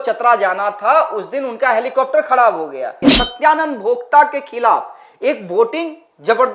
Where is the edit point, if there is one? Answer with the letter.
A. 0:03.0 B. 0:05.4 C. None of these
A